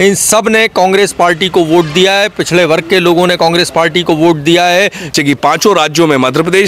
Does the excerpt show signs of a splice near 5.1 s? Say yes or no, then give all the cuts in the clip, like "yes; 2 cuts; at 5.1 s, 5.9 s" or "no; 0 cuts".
yes; 1 cut; at 5.1 s